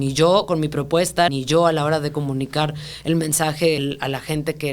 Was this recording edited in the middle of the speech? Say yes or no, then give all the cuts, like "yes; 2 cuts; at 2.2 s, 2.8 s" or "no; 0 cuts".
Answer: yes; 2 cuts; at 1.3 s, 3.8 s